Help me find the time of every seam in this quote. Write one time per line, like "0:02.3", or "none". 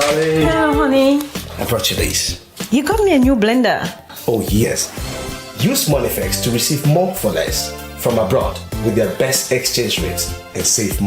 0:04.6